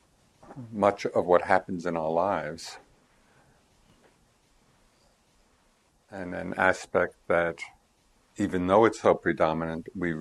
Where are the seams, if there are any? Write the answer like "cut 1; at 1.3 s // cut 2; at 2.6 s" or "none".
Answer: cut 1; at 3.9 s